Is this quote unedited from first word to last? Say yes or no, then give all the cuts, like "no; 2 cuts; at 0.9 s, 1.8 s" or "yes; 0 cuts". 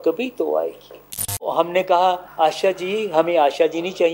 no; 2 cuts; at 1.5 s, 2.3 s